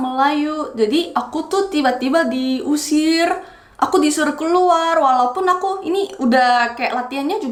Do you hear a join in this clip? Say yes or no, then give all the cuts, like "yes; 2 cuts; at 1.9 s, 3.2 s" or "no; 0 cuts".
no; 0 cuts